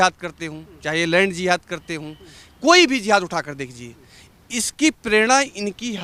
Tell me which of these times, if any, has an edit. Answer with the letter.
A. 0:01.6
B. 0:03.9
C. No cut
C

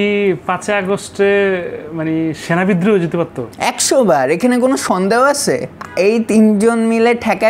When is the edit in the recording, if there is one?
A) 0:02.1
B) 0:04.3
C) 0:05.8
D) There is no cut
C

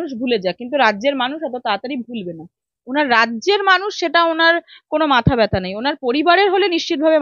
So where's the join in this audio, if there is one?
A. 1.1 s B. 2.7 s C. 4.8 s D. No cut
B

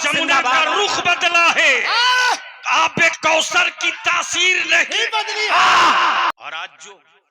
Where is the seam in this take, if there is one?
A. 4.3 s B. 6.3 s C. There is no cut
B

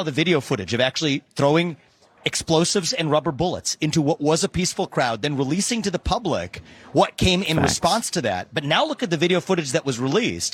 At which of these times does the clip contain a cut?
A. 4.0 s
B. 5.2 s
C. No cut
C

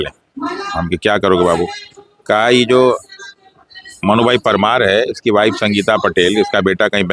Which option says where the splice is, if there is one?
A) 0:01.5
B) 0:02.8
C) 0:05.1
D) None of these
D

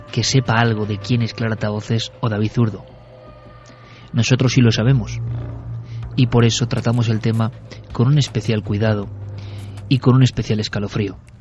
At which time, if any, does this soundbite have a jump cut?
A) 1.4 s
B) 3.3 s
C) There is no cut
C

